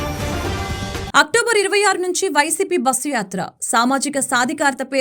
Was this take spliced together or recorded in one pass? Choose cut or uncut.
cut